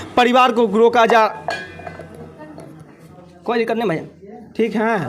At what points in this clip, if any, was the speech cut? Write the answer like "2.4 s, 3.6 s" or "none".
3.4 s